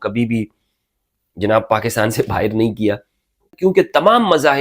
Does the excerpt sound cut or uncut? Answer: cut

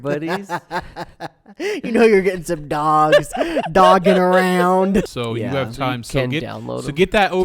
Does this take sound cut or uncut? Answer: cut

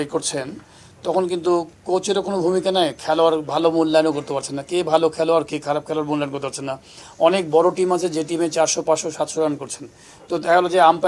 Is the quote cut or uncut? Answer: uncut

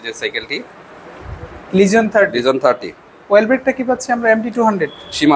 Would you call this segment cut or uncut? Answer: uncut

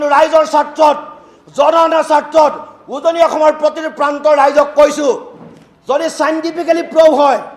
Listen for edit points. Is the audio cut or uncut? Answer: uncut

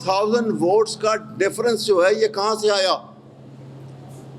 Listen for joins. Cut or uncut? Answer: uncut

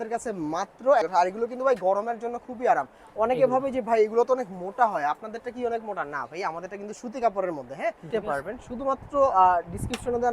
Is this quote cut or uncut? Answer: cut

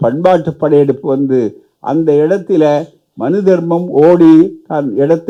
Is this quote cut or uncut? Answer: uncut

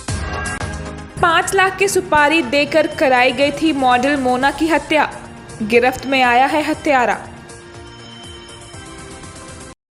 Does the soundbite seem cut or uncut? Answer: uncut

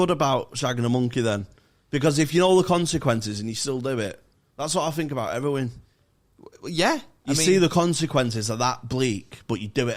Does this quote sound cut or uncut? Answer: uncut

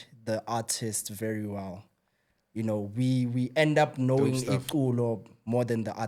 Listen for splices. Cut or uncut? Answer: uncut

